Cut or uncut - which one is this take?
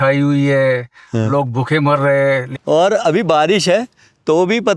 cut